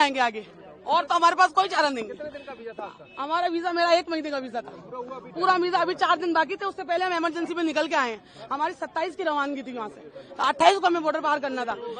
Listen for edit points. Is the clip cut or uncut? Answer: uncut